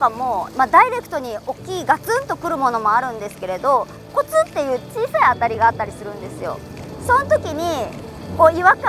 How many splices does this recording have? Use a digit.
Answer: 1